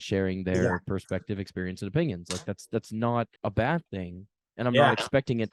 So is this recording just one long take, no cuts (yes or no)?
yes